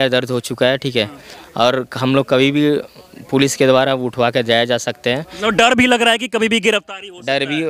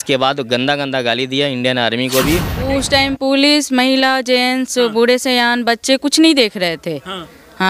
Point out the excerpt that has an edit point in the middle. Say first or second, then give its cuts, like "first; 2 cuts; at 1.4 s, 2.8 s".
second; 1 cut; at 2.6 s